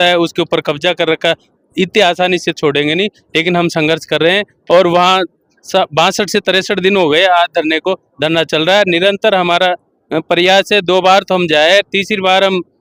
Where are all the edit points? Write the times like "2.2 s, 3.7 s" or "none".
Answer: none